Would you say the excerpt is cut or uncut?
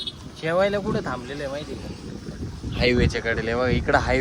uncut